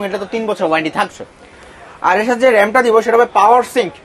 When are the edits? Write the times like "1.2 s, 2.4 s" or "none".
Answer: none